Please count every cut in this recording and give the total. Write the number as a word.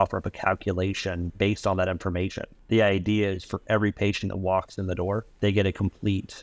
three